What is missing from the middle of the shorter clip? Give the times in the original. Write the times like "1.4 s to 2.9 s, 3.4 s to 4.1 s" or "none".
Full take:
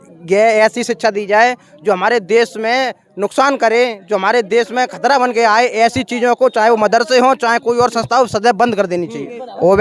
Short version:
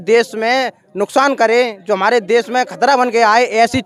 none